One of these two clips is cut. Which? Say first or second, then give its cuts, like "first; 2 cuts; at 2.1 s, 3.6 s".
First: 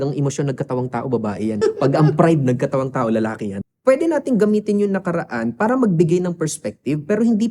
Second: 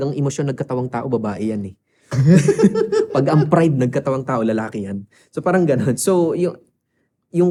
first; 2 cuts; at 1.6 s, 3.6 s